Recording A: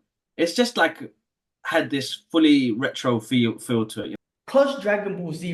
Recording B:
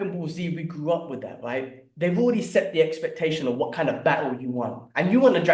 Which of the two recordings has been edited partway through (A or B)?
A